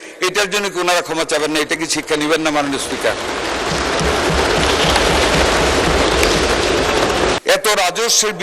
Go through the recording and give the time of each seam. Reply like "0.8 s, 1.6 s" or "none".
7.4 s